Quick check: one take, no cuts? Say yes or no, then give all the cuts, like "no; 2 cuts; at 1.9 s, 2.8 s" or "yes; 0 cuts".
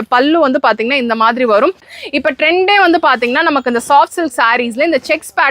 no; 1 cut; at 1.9 s